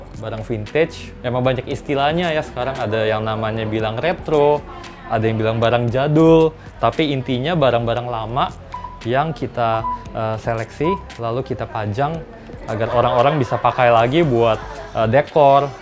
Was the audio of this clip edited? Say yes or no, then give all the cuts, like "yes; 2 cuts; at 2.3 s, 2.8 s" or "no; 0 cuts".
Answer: no; 0 cuts